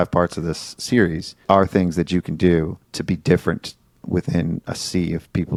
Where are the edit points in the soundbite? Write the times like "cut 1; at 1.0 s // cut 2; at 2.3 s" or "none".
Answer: none